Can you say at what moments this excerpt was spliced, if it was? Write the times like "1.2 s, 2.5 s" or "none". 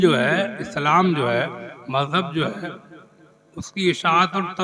1.7 s